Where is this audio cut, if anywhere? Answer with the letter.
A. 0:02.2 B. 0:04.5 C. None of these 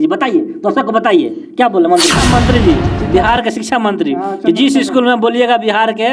A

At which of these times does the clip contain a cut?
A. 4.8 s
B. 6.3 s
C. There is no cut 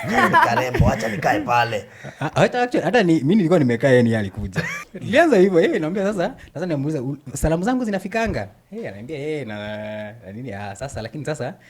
A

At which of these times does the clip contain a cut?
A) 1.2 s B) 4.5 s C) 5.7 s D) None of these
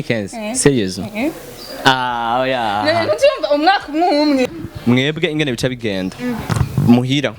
B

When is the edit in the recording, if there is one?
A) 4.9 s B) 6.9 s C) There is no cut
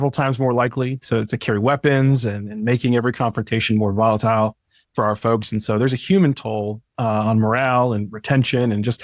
C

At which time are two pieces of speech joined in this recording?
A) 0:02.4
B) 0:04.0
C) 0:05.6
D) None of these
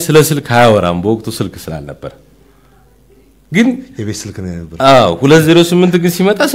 D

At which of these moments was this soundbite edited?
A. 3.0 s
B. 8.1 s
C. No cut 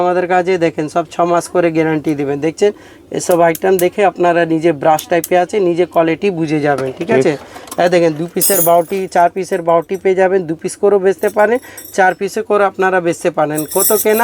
C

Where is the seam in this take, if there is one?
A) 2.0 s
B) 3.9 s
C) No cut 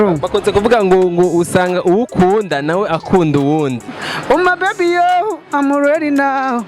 B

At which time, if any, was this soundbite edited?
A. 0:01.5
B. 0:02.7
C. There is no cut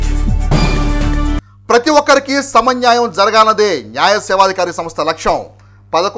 A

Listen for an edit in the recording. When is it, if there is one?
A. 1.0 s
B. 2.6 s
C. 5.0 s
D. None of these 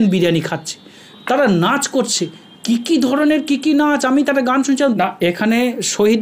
C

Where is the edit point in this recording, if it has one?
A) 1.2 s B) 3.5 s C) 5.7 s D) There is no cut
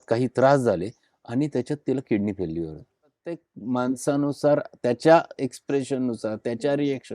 B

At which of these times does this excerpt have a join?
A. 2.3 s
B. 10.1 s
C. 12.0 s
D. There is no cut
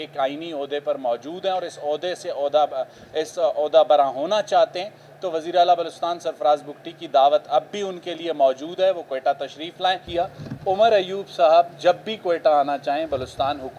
B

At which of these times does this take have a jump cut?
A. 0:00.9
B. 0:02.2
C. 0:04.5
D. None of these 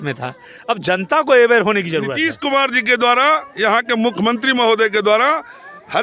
B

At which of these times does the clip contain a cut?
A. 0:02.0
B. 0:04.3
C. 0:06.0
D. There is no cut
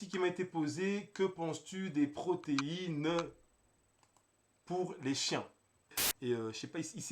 C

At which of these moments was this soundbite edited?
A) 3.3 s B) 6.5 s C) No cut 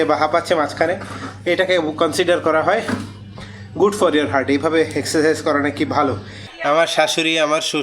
B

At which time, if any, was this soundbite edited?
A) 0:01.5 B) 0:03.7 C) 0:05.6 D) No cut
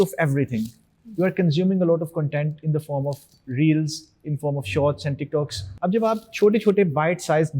C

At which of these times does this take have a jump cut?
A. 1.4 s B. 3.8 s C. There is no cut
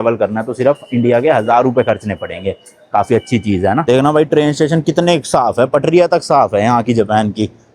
B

